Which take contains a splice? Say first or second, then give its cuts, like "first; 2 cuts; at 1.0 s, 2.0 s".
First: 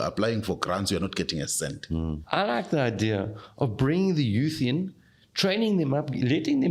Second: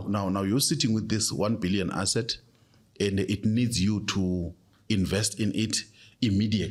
first; 1 cut; at 2.2 s